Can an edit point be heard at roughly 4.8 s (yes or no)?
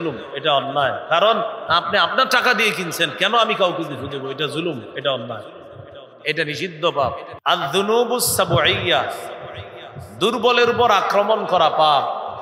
no